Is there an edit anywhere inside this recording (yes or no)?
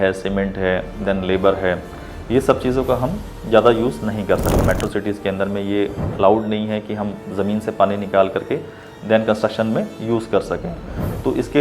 yes